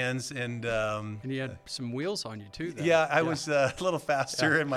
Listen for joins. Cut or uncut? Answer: cut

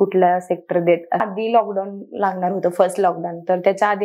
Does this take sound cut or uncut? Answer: cut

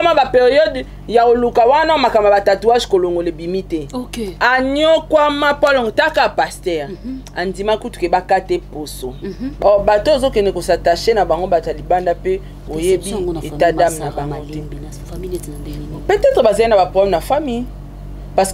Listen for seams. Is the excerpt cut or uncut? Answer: cut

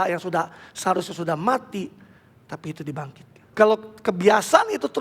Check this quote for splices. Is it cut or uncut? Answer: cut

